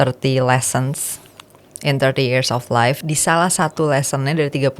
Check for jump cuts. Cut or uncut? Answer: cut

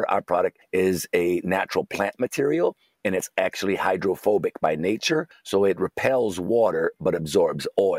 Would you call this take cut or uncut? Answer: uncut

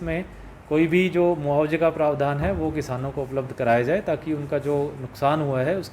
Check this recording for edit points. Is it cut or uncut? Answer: uncut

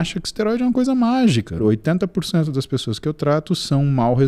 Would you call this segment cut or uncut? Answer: cut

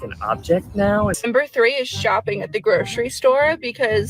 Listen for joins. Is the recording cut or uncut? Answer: cut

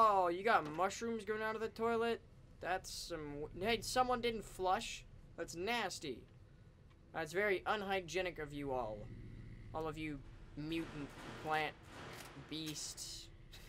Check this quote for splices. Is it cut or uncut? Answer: uncut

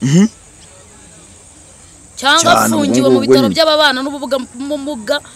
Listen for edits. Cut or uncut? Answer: uncut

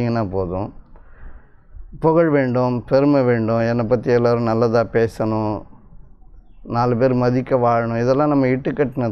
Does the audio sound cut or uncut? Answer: uncut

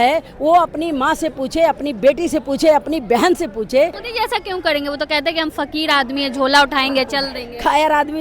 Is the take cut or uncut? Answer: cut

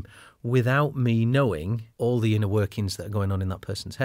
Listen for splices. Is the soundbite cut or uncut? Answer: cut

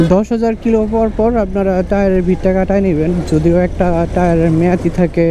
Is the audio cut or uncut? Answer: uncut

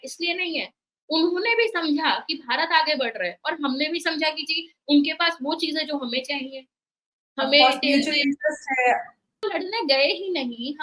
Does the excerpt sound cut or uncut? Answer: cut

